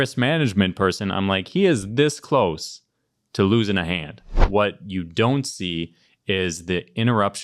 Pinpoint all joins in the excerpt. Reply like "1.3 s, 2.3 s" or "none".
4.4 s